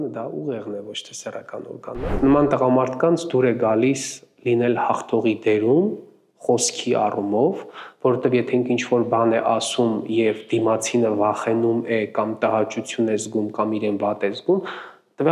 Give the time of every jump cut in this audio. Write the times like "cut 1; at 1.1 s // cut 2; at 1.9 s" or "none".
cut 1; at 2.0 s